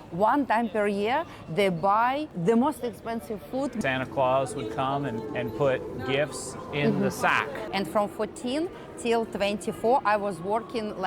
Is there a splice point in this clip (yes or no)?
yes